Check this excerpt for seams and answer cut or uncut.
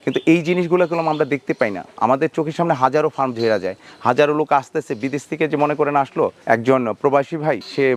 uncut